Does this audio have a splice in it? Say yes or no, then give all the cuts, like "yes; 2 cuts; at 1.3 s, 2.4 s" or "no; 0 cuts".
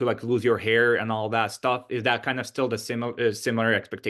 no; 0 cuts